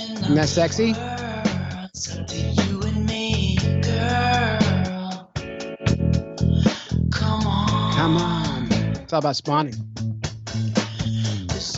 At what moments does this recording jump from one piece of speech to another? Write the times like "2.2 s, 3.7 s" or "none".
1.5 s